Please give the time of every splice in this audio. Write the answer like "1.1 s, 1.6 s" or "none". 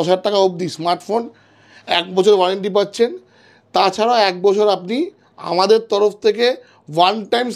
none